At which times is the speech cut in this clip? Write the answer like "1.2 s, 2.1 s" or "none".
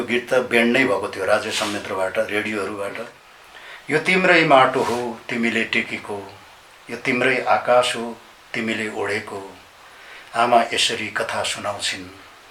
3.7 s

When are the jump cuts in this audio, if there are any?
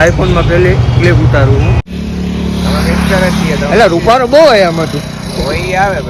1.8 s

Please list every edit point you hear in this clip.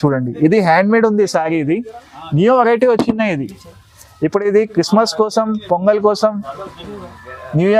none

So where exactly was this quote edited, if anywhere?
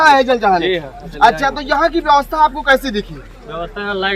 0.9 s

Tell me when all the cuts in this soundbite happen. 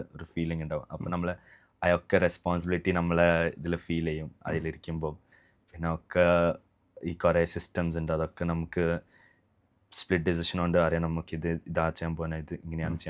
none

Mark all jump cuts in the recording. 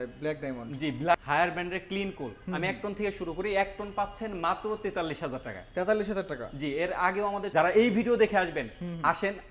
1.1 s, 7.5 s

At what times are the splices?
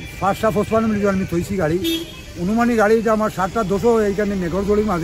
none

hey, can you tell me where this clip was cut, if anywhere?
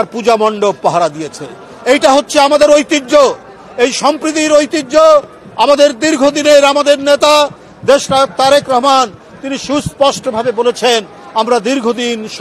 none

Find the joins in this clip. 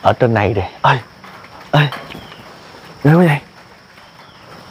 none

